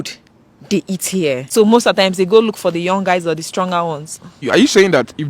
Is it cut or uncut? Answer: cut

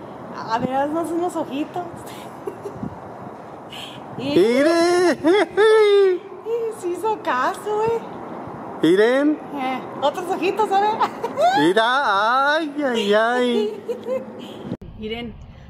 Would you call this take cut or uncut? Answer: cut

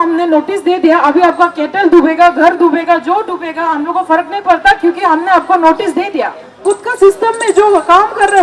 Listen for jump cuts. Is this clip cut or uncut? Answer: cut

